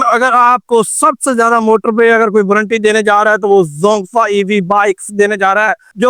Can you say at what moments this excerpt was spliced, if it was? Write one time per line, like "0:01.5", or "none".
none